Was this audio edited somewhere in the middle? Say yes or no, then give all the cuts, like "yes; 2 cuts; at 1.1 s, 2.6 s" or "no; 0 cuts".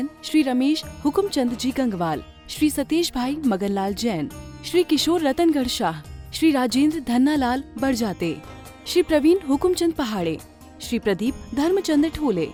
no; 0 cuts